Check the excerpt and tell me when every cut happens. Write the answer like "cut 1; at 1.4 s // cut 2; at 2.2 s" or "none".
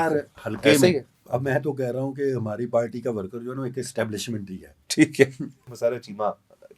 cut 1; at 1.1 s // cut 2; at 5.7 s